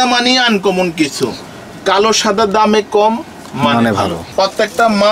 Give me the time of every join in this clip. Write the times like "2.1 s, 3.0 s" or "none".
4.2 s